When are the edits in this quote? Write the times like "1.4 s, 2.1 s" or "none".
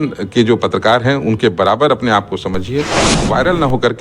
3.1 s